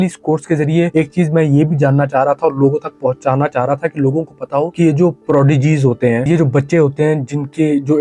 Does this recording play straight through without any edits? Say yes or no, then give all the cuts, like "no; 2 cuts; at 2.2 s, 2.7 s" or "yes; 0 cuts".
yes; 0 cuts